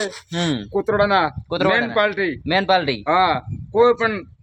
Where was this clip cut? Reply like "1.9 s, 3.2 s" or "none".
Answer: none